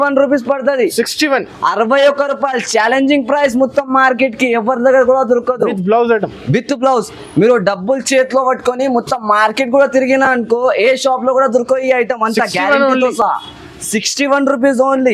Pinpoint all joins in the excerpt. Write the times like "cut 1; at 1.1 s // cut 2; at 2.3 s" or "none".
none